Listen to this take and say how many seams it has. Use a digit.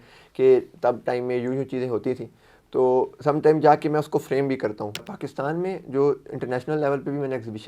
1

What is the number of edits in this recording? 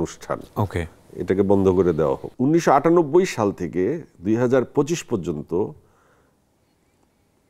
1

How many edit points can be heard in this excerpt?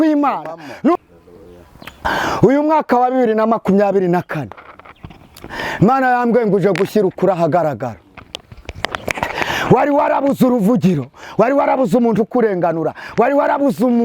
1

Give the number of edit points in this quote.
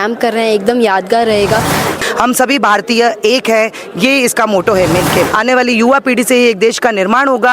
2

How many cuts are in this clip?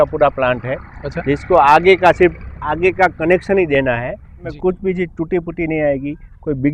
1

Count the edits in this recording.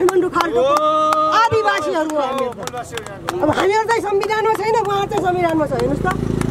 0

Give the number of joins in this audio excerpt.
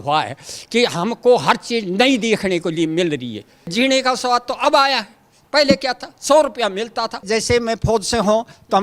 2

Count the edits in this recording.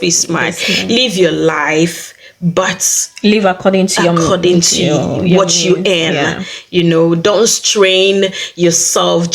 0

